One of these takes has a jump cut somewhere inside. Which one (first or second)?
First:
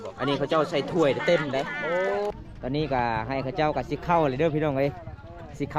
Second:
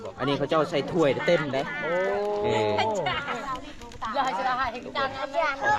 first